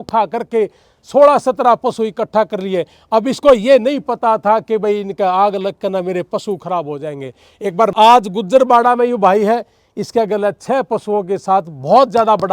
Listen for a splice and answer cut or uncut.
cut